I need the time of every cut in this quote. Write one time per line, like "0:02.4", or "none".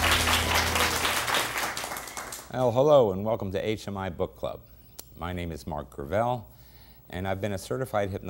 0:01.5